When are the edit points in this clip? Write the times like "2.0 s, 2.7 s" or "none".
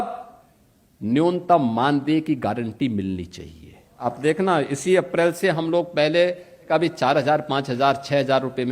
4.0 s, 6.7 s